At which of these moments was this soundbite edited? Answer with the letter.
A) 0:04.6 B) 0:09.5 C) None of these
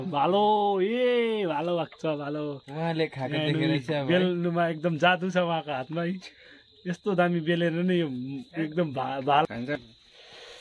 B